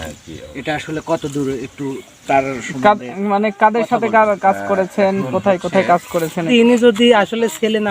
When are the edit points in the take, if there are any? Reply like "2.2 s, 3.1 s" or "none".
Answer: 6.5 s